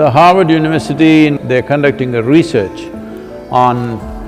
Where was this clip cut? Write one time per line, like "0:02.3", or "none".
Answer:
0:01.4